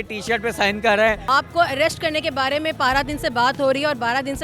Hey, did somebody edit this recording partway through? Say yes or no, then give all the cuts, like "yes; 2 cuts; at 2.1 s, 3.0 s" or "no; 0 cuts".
yes; 1 cut; at 1.2 s